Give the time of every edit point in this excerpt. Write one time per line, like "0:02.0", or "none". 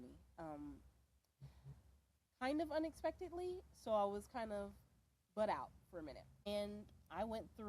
0:06.5